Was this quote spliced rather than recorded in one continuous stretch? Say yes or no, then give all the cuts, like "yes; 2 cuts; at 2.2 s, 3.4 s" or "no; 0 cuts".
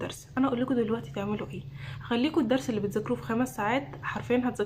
no; 0 cuts